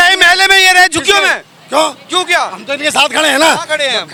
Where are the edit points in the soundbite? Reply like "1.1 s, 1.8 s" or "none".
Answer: none